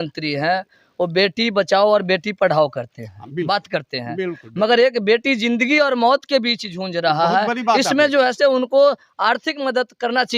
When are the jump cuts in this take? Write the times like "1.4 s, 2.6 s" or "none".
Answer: none